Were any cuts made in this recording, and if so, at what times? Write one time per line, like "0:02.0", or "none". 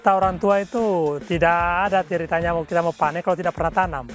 none